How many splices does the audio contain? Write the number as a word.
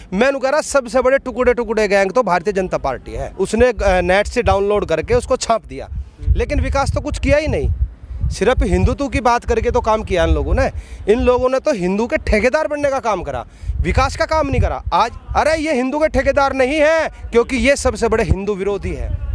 two